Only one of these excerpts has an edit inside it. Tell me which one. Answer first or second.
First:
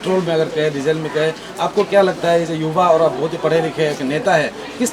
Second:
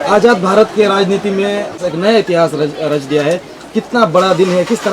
second